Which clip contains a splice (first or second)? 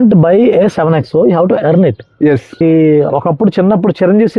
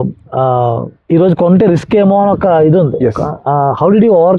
first